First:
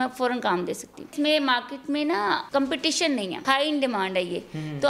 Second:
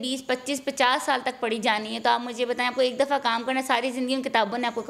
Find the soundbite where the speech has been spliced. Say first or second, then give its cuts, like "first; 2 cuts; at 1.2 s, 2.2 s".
first; 3 cuts; at 1.1 s, 2.4 s, 3.4 s